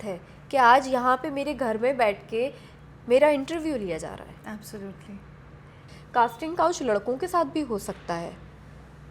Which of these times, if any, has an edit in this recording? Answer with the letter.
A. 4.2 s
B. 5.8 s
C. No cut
B